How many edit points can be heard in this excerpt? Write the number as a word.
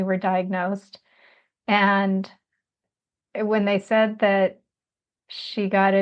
one